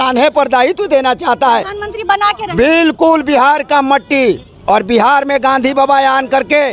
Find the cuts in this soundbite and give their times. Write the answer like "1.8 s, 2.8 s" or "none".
none